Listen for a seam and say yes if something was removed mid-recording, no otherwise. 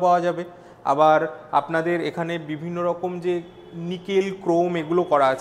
no